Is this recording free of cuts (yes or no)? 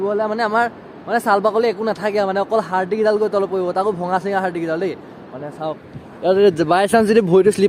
yes